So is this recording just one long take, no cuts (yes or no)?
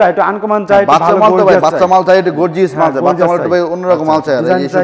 yes